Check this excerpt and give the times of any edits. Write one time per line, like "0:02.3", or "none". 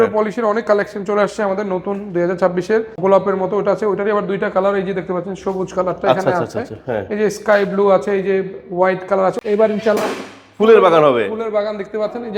0:03.0
0:09.4